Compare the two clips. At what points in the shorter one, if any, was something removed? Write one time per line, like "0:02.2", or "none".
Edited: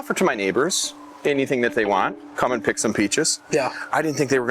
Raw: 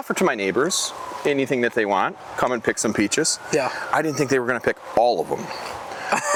none